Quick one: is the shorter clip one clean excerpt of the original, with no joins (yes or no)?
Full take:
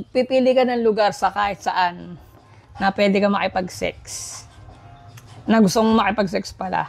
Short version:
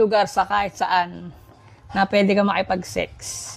yes